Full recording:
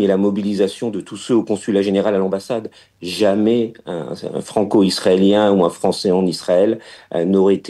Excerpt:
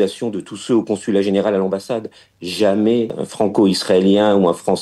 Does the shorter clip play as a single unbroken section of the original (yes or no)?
no